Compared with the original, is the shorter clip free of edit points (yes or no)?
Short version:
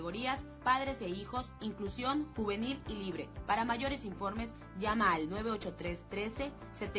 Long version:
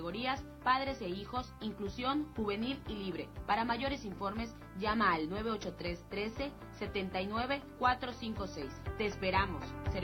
yes